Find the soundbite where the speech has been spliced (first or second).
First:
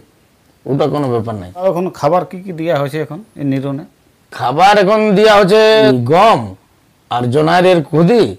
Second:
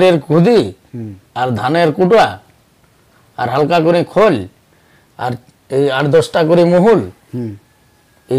first